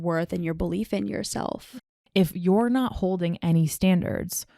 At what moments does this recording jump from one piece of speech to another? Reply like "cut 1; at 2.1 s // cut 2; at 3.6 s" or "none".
cut 1; at 1.8 s